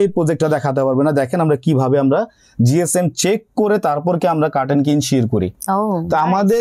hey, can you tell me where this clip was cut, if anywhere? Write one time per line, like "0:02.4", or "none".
none